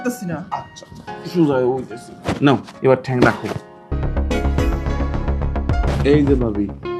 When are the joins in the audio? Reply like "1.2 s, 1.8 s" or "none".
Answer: 4.0 s, 5.9 s